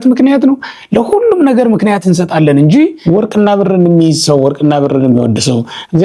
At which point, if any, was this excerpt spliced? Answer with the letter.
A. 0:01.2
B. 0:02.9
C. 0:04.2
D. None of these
B